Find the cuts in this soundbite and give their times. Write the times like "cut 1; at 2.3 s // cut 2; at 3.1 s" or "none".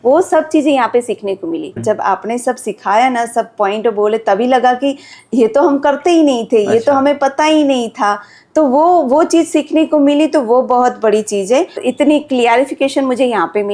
cut 1; at 1.8 s // cut 2; at 11.8 s